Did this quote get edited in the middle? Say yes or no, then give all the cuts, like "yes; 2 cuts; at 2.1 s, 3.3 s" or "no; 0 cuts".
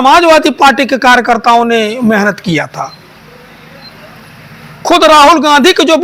no; 0 cuts